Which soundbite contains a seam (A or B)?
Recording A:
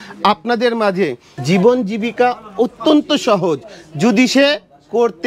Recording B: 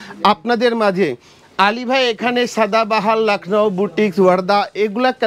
A